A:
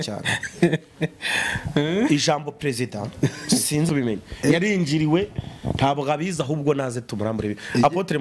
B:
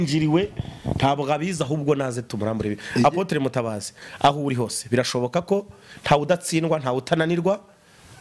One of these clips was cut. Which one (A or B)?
A